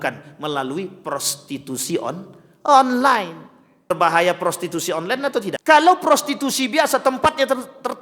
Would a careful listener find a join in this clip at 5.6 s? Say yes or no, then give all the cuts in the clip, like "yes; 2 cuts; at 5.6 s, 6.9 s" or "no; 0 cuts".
yes; 2 cuts; at 3.9 s, 5.6 s